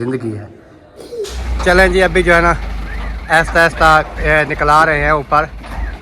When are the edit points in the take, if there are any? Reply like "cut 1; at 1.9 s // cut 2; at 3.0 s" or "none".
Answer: cut 1; at 1.4 s